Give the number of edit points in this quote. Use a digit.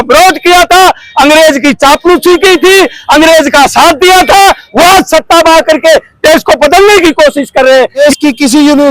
1